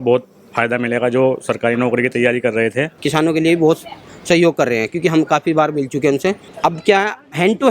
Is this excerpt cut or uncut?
cut